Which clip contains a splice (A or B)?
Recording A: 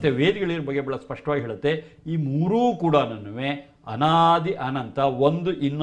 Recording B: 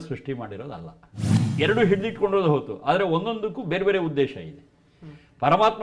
B